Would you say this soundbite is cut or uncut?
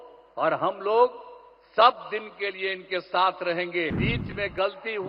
cut